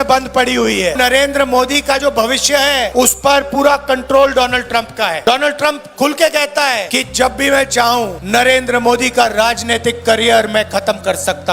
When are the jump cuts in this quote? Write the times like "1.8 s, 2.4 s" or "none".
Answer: 0.9 s, 2.9 s, 5.2 s, 6.9 s, 8.2 s